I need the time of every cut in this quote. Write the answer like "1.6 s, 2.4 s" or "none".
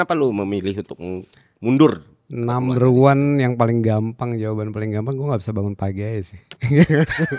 none